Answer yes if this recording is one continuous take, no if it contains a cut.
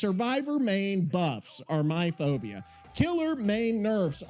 yes